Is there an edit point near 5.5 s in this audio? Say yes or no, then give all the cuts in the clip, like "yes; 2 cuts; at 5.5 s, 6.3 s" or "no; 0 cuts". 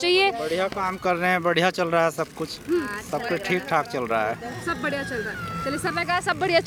no; 0 cuts